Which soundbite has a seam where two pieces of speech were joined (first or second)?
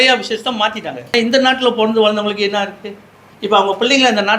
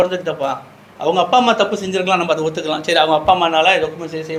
first